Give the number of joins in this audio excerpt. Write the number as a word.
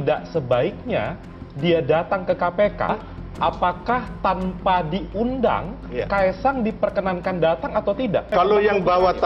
two